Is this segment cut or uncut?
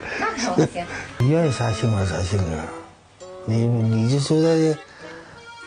cut